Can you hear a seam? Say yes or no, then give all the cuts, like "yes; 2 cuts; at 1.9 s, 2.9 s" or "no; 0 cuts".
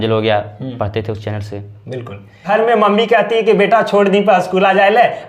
yes; 1 cut; at 2.4 s